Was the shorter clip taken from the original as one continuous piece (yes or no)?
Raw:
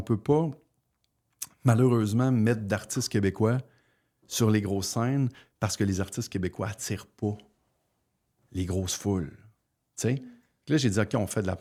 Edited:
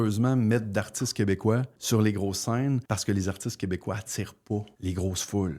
no